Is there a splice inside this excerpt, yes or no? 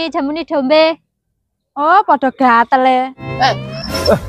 yes